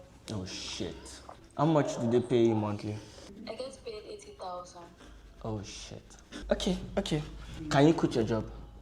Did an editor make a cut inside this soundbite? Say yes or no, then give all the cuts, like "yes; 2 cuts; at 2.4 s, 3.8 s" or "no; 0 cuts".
no; 0 cuts